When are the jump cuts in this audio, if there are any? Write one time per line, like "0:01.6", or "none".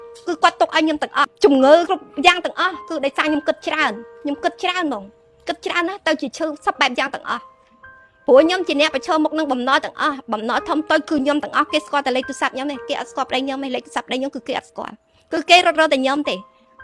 0:01.3
0:01.9